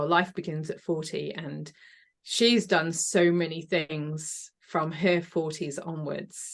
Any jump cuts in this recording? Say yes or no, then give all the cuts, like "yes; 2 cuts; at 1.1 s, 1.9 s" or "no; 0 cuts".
no; 0 cuts